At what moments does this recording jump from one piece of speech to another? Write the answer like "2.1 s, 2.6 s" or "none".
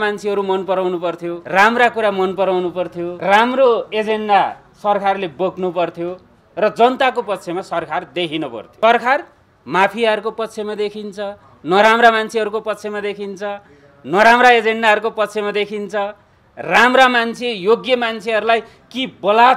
1.4 s, 3.1 s, 8.6 s